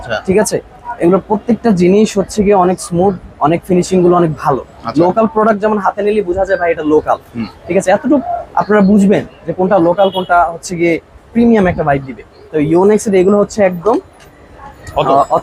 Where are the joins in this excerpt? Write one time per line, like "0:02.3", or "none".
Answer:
none